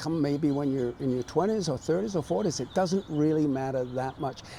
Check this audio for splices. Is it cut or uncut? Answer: uncut